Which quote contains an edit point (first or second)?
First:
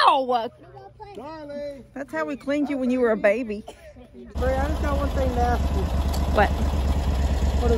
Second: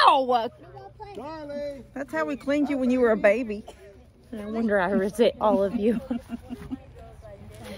first